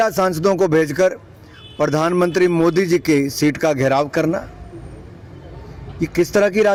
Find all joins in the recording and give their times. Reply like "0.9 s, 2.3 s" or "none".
none